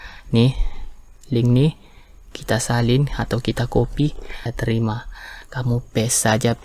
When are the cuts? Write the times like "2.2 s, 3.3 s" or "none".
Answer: 4.5 s